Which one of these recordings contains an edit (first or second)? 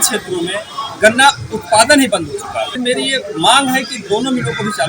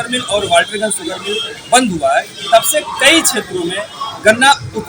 first